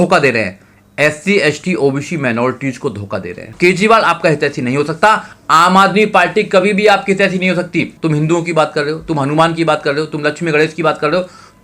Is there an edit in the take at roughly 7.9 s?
yes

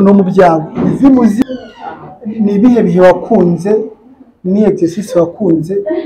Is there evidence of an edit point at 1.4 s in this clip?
yes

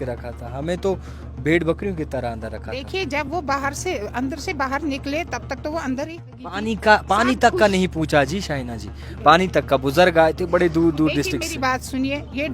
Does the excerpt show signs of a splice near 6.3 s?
yes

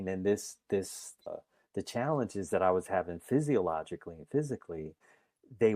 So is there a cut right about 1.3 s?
yes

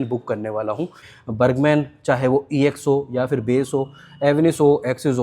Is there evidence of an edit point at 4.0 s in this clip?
no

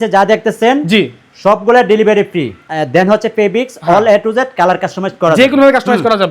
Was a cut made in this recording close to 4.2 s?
no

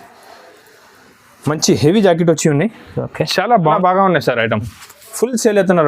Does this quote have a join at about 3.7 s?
yes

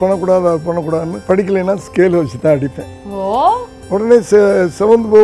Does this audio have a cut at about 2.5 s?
no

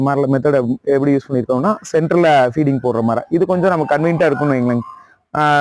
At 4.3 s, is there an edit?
no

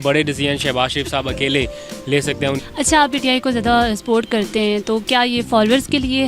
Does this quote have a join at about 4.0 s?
no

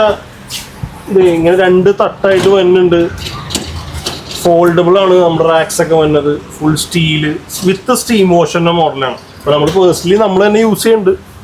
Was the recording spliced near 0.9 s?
no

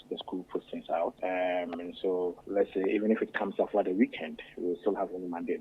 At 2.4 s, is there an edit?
yes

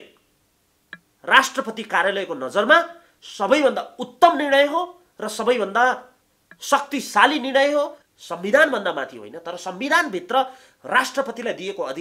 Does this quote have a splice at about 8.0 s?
yes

